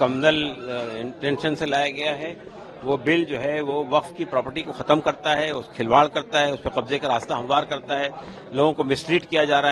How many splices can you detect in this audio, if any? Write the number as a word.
zero